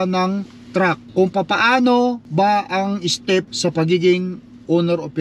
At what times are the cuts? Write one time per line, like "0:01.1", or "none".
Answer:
0:01.0
0:02.2
0:03.5